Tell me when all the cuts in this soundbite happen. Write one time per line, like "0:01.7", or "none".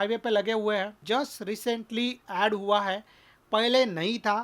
0:01.0